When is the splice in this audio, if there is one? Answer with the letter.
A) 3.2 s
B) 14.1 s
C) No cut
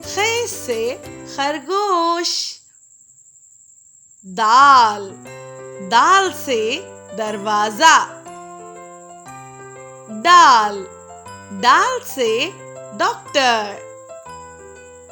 B